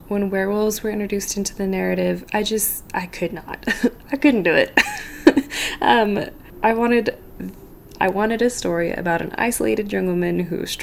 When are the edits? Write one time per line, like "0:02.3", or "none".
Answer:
none